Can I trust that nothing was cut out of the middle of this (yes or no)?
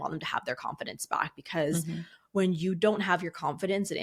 yes